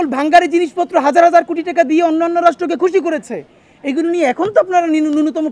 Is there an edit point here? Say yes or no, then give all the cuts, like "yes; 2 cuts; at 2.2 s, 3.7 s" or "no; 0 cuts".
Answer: no; 0 cuts